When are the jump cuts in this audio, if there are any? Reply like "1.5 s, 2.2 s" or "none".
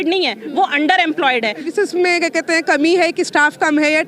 1.7 s